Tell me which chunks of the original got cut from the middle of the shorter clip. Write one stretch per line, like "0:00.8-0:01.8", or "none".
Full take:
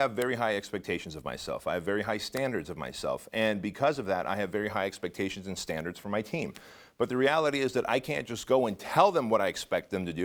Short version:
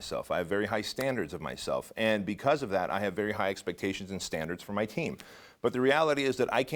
none